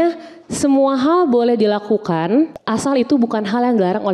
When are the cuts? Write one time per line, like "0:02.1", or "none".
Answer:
0:02.6